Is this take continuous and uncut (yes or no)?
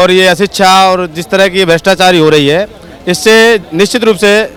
yes